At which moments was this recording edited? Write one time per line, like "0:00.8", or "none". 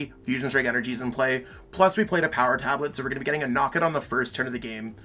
none

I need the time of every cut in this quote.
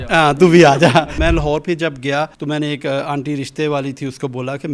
0:01.1
0:02.4

